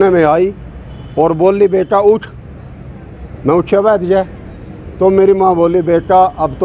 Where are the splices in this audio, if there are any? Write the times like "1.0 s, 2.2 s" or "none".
none